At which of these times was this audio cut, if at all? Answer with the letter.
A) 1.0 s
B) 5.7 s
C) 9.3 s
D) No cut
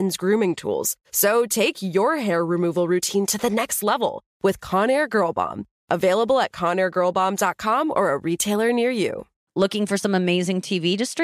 C